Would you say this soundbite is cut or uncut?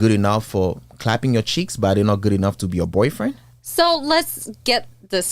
uncut